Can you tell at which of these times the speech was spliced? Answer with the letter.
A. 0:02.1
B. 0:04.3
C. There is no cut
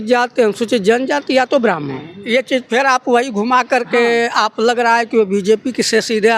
A